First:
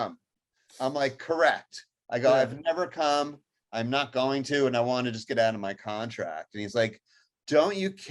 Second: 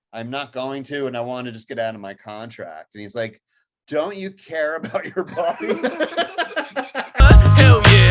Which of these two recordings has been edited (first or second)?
second